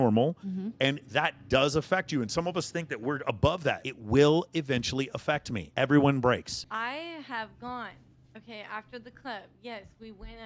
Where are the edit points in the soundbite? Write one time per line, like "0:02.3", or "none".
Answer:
0:03.9
0:06.6